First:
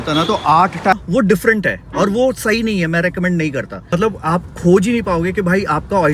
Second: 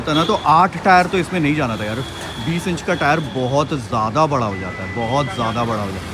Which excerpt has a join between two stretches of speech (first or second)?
first